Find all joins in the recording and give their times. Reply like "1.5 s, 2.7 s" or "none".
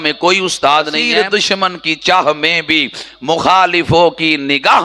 1.0 s